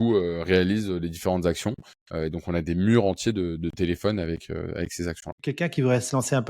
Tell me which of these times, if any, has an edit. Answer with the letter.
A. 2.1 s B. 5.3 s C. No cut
B